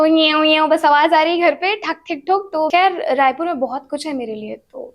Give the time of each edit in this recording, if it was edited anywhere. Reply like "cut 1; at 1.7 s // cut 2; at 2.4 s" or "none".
cut 1; at 2.7 s